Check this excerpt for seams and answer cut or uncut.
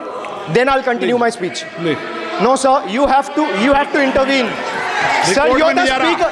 uncut